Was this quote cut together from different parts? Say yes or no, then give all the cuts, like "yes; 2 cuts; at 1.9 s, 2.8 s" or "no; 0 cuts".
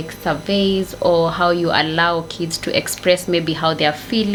no; 0 cuts